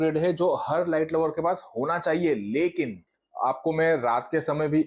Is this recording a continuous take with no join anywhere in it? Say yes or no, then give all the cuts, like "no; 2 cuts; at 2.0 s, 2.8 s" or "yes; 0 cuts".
no; 1 cut; at 3.1 s